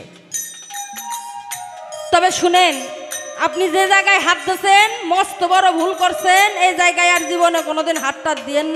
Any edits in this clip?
no; 0 cuts

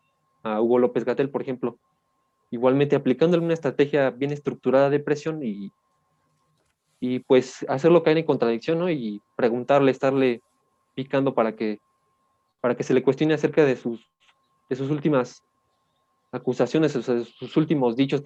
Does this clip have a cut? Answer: no; 0 cuts

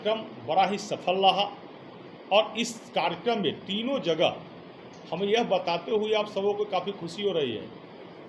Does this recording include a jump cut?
no; 0 cuts

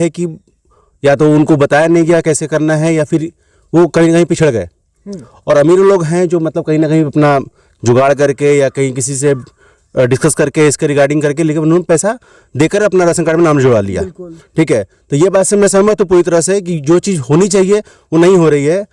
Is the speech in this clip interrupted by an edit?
no; 0 cuts

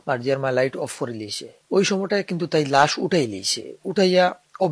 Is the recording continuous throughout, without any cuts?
yes; 0 cuts

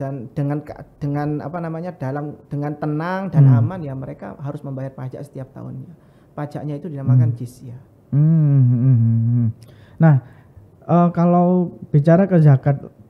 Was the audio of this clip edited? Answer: no; 0 cuts

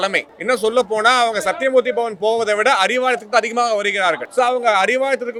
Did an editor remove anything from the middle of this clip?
no; 0 cuts

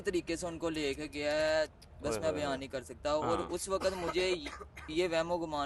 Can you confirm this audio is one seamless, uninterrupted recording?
yes; 0 cuts

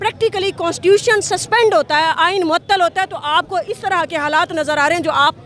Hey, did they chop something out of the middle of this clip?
no; 0 cuts

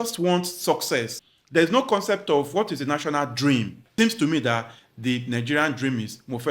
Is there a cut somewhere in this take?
yes; 2 cuts; at 1.1 s, 3.9 s

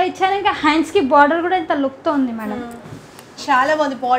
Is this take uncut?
yes; 0 cuts

